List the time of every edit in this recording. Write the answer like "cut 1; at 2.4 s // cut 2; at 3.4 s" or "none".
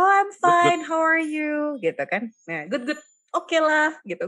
none